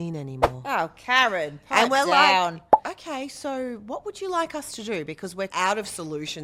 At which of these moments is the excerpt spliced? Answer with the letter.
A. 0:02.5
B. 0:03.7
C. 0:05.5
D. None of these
C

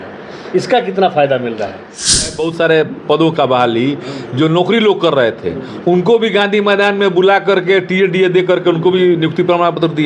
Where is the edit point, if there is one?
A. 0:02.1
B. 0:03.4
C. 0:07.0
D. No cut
A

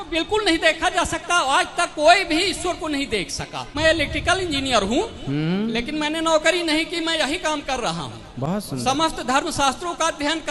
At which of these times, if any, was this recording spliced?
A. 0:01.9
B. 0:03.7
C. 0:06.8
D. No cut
B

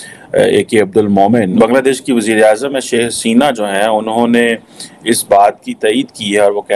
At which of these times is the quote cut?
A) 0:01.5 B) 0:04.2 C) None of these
A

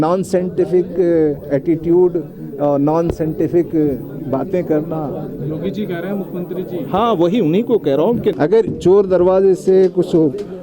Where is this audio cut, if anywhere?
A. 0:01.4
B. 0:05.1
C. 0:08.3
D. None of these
C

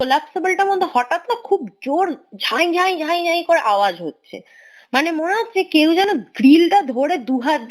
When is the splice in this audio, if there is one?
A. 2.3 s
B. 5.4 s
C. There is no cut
C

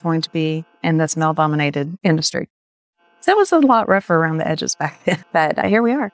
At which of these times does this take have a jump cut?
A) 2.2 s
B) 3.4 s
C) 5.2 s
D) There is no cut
C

